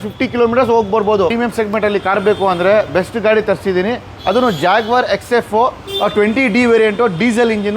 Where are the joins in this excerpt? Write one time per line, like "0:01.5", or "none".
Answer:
0:01.3